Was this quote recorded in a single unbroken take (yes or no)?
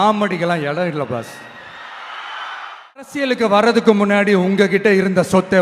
no